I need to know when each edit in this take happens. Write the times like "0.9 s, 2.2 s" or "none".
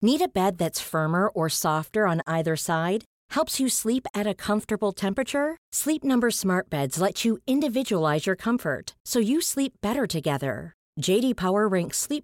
none